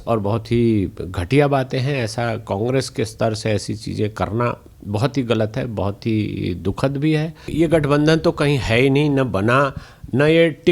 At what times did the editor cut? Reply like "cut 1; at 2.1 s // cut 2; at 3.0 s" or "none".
cut 1; at 7.5 s